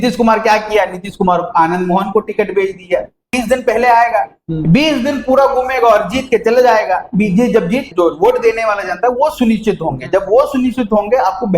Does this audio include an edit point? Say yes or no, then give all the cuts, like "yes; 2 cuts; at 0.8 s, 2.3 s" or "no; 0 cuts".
yes; 2 cuts; at 3.3 s, 7.9 s